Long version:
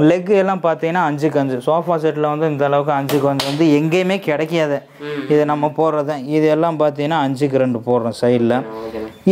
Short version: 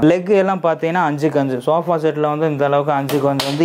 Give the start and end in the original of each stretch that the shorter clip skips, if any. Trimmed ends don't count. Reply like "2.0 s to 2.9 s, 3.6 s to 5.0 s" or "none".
none